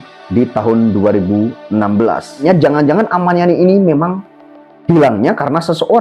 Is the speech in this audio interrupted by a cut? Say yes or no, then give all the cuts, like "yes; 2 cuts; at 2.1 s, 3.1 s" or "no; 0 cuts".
yes; 1 cut; at 2.4 s